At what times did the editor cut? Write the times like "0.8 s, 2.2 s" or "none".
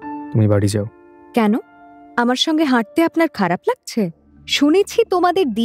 4.4 s